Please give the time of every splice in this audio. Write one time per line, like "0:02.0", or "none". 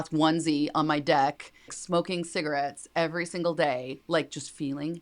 0:01.7